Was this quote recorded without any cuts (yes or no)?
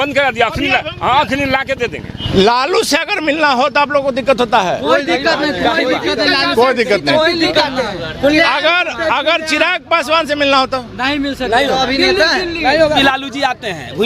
no